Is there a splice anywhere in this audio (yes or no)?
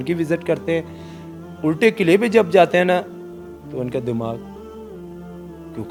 no